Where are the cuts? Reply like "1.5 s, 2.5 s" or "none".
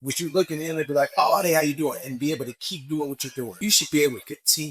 3.5 s